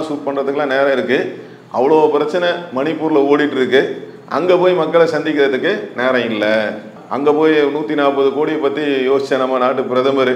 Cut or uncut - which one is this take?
uncut